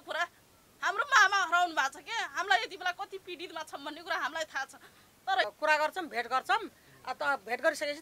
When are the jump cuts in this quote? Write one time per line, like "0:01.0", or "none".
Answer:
0:05.4